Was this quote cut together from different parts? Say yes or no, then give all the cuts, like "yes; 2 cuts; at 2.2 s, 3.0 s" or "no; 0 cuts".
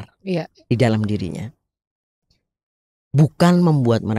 no; 0 cuts